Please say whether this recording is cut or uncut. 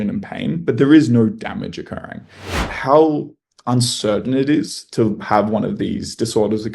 cut